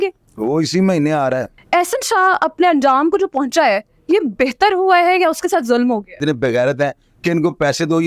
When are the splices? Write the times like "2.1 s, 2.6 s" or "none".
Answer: 1.5 s, 6.2 s